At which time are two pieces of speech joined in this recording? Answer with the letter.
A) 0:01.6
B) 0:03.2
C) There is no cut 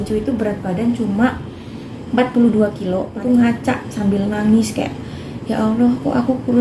B